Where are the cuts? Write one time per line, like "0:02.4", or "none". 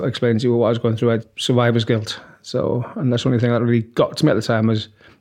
0:01.2